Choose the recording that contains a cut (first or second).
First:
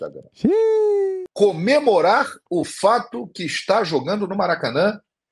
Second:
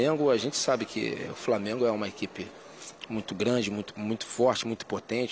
first